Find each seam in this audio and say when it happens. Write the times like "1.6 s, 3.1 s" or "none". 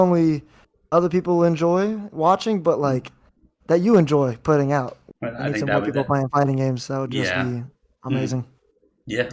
5.0 s